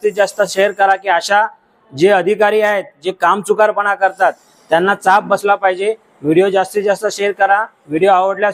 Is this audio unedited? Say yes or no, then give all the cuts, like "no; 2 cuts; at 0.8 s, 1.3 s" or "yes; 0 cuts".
yes; 0 cuts